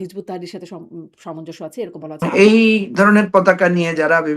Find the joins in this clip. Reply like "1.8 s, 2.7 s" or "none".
2.2 s